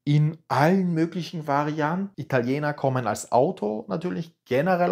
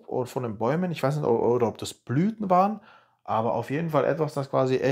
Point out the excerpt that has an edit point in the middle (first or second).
first